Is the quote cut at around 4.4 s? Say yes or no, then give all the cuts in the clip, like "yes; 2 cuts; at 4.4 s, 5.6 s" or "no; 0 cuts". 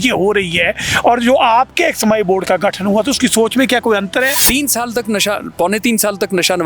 yes; 1 cut; at 4.4 s